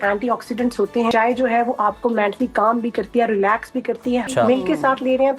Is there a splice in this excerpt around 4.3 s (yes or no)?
yes